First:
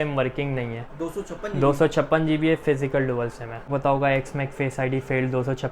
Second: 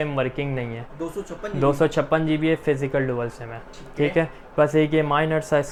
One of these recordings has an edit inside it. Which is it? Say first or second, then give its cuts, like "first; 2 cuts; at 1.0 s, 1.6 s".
first; 1 cut; at 3.7 s